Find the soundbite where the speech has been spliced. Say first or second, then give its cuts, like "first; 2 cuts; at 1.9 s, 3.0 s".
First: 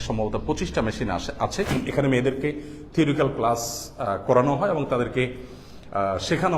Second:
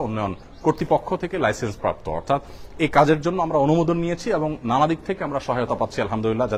first; 1 cut; at 1.7 s